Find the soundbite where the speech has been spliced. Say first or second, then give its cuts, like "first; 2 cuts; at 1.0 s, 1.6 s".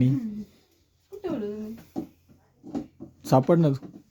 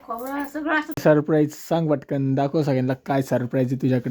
second; 1 cut; at 0.9 s